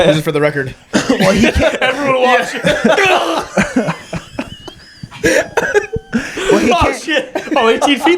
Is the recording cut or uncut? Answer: uncut